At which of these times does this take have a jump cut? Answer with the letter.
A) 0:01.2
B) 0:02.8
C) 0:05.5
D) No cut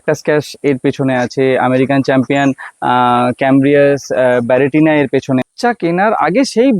C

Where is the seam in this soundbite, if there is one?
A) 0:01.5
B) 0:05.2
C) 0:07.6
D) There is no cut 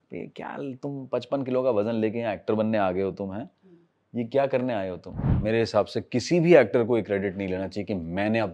B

